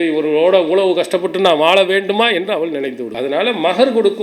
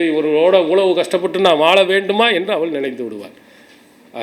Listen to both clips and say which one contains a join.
first; 1 cut; at 3.1 s

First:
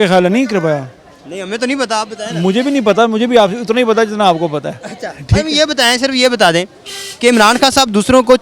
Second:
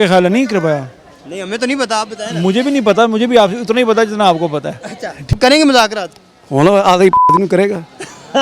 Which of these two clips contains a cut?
second; 1 cut; at 5.2 s

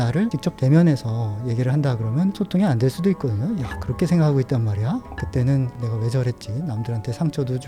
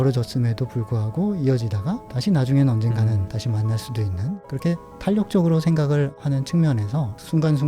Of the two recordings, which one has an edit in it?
second; 2 cuts; at 4.3 s, 6.2 s

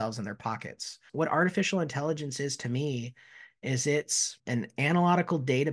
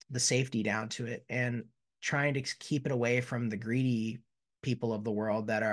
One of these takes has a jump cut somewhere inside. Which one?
first; 2 cuts; at 1.0 s, 4.3 s

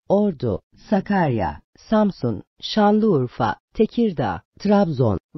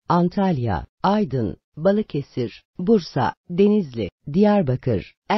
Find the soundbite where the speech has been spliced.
first; 1 cut; at 4.5 s

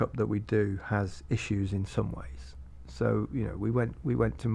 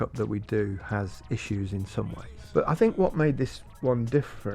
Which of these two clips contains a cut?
second; 1 cut; at 2.3 s

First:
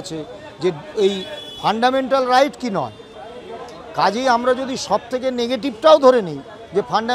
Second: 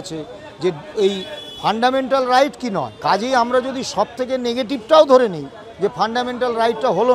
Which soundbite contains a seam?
second; 1 cut; at 2.9 s

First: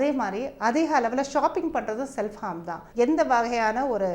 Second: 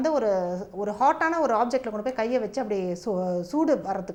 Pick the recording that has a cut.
first; 1 cut; at 2.8 s

